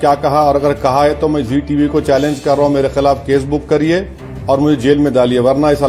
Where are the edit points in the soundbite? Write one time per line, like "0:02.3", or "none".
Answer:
none